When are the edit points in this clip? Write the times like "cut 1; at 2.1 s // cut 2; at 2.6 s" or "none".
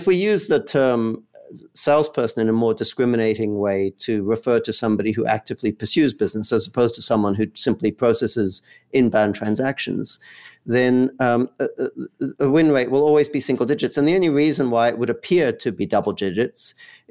none